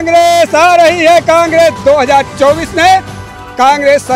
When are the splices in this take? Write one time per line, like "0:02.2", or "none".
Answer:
none